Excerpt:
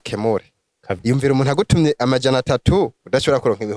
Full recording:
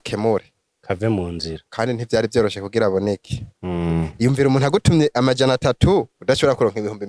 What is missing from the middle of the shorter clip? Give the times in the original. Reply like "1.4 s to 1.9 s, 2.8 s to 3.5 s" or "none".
1.0 s to 4.1 s